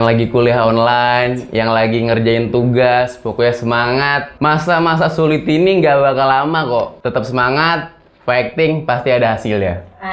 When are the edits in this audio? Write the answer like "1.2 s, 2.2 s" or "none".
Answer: none